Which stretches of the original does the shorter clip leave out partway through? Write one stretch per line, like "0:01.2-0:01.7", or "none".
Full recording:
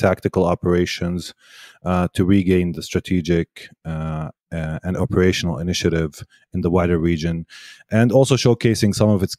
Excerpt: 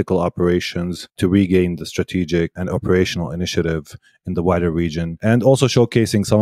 0:01.4-0:02.1
0:03.5-0:04.8
0:07.4-0:07.8